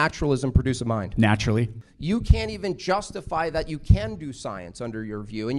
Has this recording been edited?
yes; 1 cut; at 1.8 s

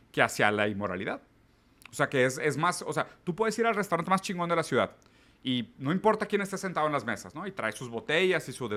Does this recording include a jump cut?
no; 0 cuts

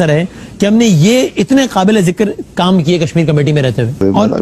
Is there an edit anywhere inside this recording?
no; 0 cuts

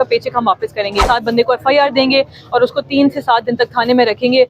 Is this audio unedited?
no; 1 cut; at 1.0 s

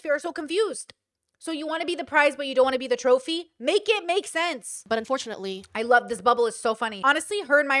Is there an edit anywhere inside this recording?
yes; 2 cuts; at 4.7 s, 6.9 s

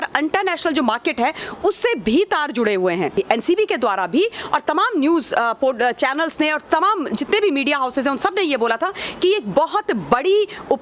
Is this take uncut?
no; 1 cut; at 3.1 s

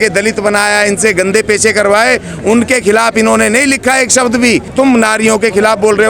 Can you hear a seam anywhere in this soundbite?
yes; 1 cut; at 4.7 s

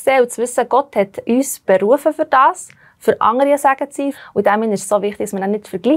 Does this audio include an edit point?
yes; 2 cuts; at 1.2 s, 4.2 s

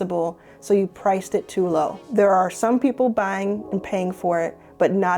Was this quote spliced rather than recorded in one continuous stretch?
yes; 1 cut; at 2.0 s

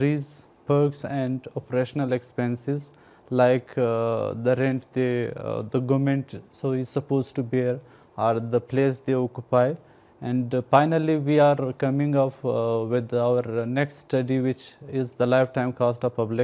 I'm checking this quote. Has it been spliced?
no; 0 cuts

